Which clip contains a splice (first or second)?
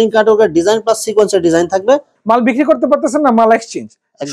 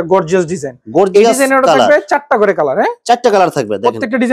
first